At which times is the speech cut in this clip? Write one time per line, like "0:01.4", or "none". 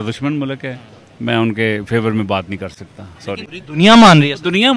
none